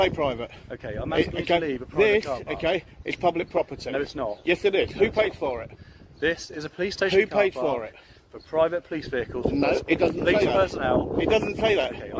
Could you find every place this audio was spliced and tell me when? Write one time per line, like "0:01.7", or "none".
none